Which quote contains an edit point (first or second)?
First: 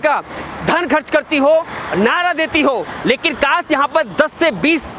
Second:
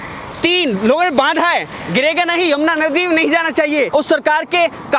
second